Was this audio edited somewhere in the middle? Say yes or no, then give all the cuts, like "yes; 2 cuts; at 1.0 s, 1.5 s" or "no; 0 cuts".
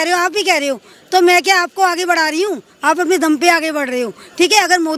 no; 0 cuts